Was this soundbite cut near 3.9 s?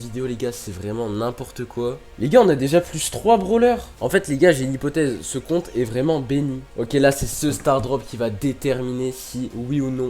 no; 2 cuts; at 2.0 s, 6.6 s

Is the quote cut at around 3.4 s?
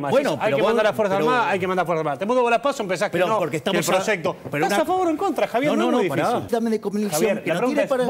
no; 1 cut; at 6.5 s

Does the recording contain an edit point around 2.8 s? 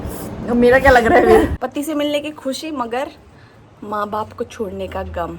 no; 1 cut; at 1.5 s

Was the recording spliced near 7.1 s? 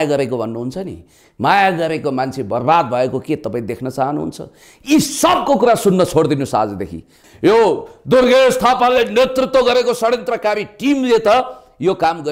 yes; 1 cut; at 7.1 s

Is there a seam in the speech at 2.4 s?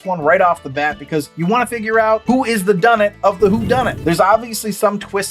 no; 1 cut; at 3.9 s

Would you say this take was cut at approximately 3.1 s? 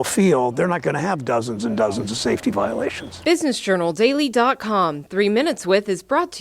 yes; 1 cut; at 3.1 s

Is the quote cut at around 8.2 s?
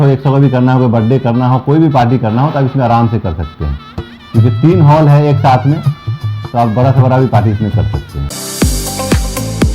yes; 1 cut; at 8.2 s

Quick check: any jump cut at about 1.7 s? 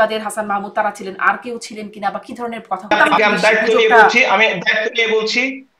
no; 1 cut; at 2.9 s

